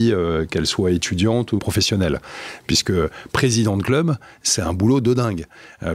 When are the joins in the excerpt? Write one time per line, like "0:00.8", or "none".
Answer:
0:01.6